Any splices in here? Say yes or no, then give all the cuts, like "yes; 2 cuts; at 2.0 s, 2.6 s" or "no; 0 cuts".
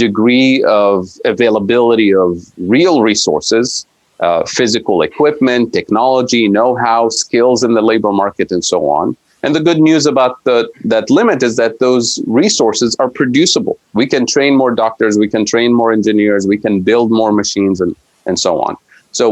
no; 0 cuts